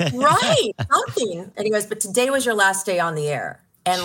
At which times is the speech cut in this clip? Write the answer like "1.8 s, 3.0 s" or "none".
1.4 s